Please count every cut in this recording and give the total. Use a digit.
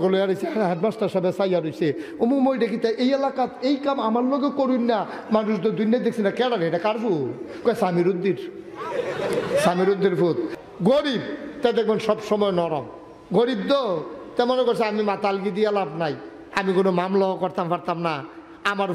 1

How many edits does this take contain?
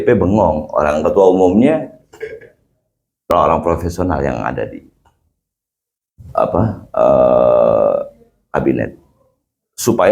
1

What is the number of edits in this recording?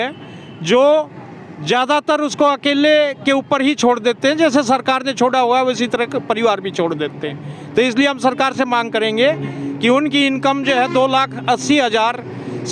0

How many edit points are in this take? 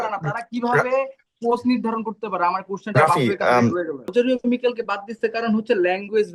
1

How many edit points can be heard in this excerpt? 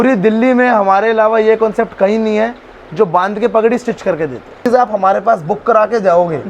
1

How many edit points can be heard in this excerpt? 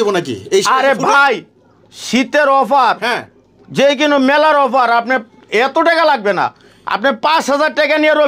0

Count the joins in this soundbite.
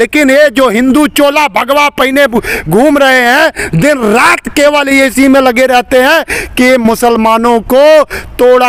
0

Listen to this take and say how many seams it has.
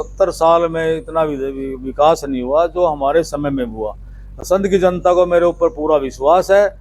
0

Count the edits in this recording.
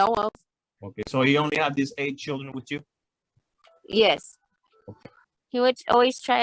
1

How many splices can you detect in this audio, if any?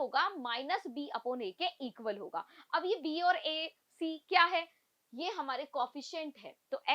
0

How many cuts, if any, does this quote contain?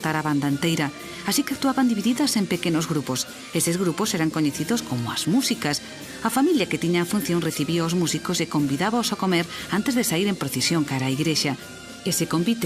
0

